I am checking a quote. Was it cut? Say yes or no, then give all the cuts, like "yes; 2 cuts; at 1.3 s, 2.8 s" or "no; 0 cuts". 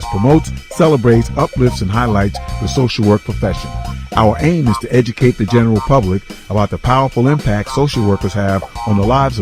no; 0 cuts